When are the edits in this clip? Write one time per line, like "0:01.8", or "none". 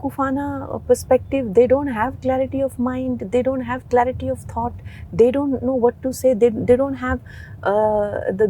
none